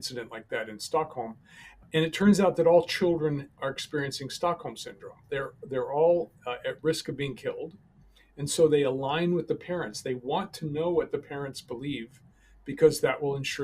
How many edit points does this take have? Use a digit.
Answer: 1